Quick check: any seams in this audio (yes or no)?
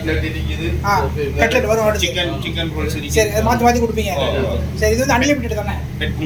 no